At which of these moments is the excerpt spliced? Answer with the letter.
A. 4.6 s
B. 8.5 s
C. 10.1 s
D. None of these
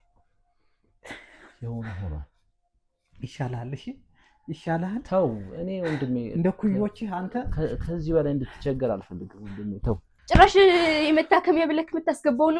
C